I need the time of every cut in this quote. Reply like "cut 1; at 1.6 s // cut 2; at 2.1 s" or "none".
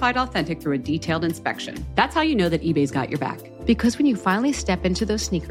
none

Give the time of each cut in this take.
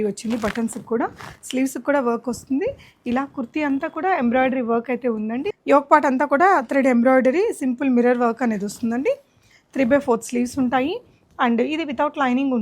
cut 1; at 5.5 s

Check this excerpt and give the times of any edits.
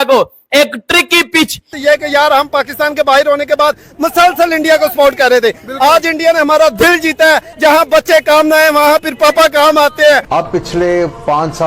cut 1; at 1.8 s // cut 2; at 10.2 s

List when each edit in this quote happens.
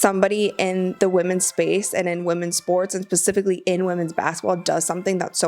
cut 1; at 0.9 s

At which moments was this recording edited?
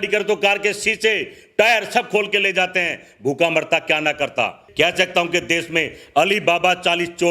cut 1; at 4.6 s

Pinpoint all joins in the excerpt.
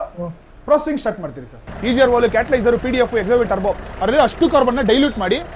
cut 1; at 1.7 s

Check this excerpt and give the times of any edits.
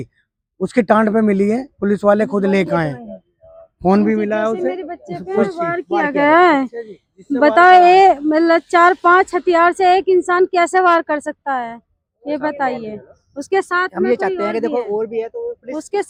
none

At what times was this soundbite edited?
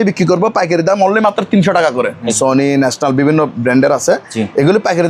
cut 1; at 2.3 s

